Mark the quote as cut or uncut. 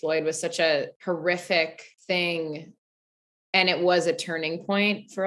cut